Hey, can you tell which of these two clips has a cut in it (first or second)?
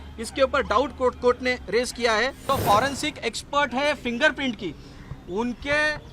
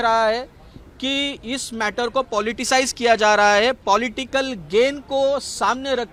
first